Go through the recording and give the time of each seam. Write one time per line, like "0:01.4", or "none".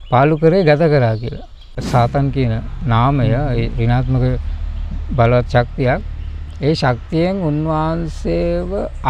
0:01.7